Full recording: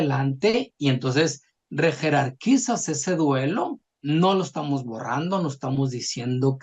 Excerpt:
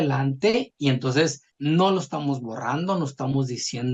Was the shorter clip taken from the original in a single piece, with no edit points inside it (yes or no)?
no